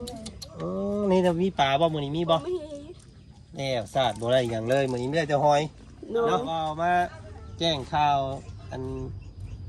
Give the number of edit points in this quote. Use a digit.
1